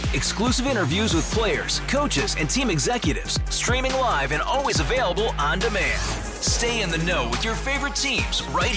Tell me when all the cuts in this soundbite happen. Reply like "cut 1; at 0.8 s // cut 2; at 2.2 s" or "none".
none